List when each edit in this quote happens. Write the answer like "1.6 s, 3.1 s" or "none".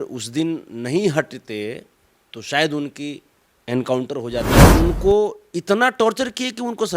4.7 s